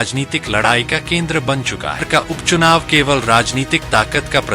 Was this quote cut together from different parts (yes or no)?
yes